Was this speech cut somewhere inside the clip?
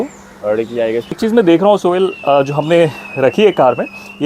yes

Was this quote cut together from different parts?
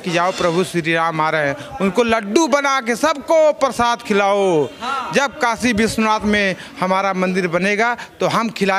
no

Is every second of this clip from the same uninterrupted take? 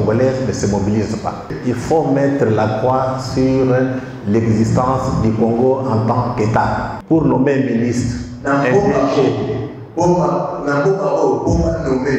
no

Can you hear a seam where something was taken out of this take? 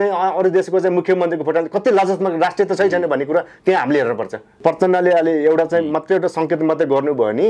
yes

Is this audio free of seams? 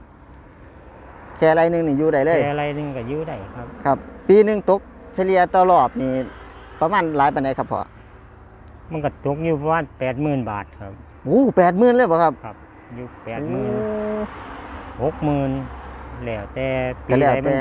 yes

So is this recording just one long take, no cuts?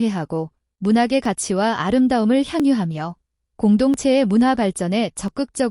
no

